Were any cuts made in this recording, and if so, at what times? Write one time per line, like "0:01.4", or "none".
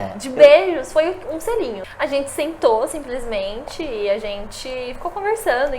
0:01.9